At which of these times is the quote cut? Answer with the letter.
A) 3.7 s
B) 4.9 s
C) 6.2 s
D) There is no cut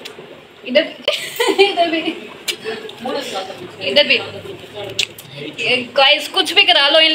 D